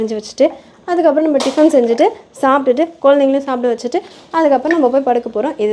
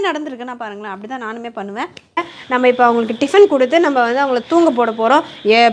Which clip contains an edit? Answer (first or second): second